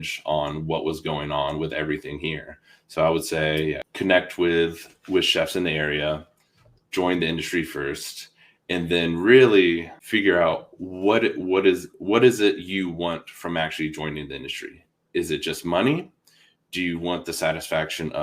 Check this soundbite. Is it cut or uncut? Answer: cut